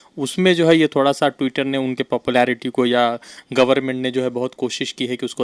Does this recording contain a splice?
no; 0 cuts

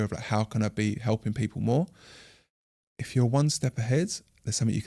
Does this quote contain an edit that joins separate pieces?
no; 0 cuts

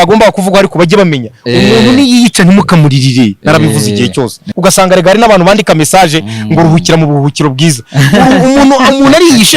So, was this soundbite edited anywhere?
yes; 1 cut; at 4.4 s

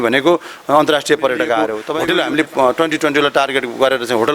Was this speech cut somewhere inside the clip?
yes; 1 cut; at 1.9 s

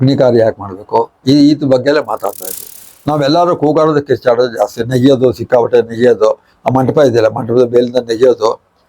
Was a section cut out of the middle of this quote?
yes; 1 cut; at 2.6 s

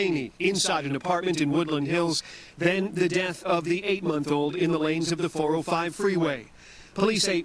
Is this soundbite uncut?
no; 1 cut; at 1.2 s

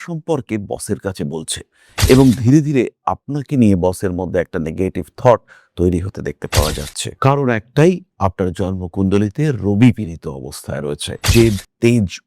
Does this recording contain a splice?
yes; 1 cut; at 11.2 s

